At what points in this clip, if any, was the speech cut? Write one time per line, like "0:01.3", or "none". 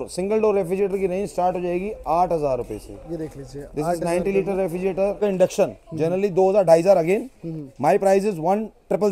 0:05.2